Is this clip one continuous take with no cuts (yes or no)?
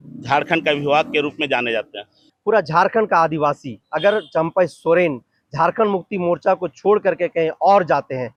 yes